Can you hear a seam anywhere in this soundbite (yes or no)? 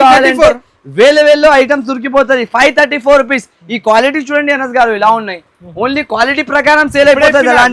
no